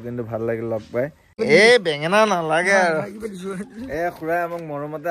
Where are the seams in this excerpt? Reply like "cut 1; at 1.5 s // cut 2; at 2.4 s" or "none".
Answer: cut 1; at 1.4 s